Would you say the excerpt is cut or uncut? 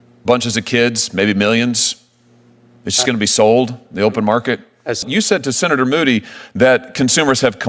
cut